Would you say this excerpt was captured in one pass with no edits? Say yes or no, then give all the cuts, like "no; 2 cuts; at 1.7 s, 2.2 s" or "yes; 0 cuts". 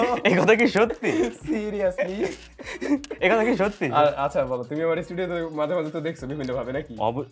yes; 0 cuts